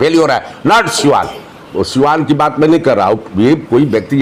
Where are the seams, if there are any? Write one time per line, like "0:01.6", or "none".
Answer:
none